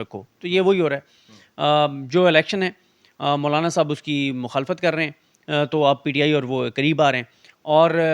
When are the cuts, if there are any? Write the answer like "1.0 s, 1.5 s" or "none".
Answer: none